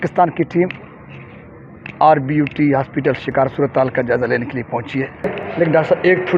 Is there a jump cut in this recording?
yes; 2 cuts; at 3.5 s, 5.4 s

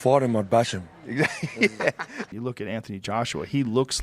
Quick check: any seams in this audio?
yes; 1 cut; at 2.3 s

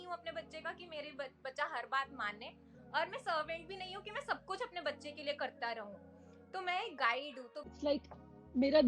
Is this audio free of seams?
no; 1 cut; at 7.7 s

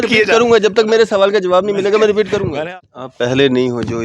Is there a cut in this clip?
yes; 1 cut; at 2.5 s

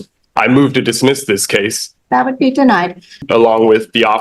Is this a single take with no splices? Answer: no; 2 cuts; at 1.8 s, 3.2 s

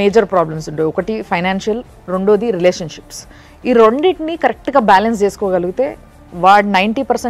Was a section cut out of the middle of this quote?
no; 0 cuts

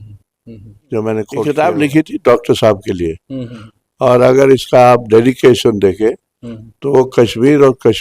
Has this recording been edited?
yes; 1 cut; at 1.4 s

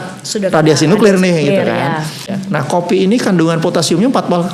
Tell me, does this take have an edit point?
yes; 1 cut; at 2.3 s

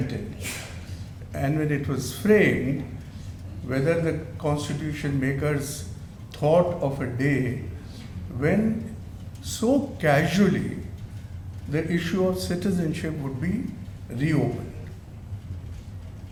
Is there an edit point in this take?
no; 0 cuts

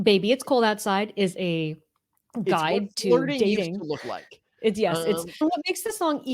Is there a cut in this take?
yes; 1 cut; at 5.4 s

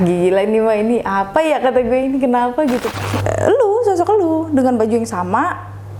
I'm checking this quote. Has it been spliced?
yes; 1 cut; at 2.9 s

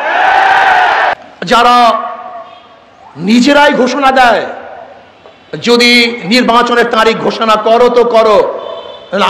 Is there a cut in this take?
yes; 1 cut; at 1.2 s

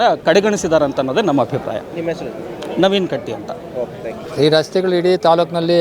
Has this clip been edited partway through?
no; 0 cuts

